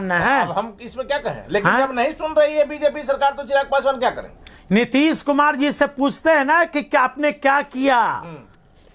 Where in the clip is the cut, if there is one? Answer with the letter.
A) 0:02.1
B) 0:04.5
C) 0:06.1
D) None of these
B